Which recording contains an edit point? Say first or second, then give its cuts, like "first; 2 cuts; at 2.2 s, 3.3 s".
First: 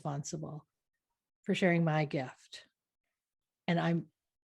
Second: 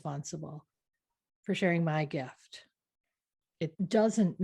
second; 1 cut; at 3.5 s